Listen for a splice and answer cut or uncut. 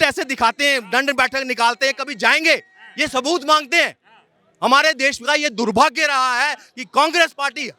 uncut